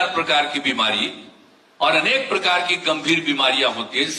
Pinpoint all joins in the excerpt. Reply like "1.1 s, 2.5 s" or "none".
none